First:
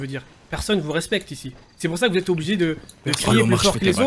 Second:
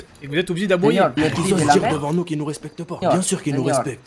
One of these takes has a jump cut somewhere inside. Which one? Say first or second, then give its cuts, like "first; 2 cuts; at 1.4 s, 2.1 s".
second; 2 cuts; at 1.1 s, 3.0 s